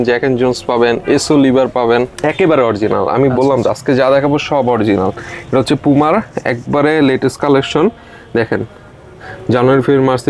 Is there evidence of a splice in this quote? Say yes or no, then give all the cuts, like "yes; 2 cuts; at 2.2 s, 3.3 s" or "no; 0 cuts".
yes; 1 cut; at 2.2 s